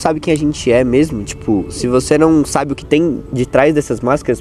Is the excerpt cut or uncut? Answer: uncut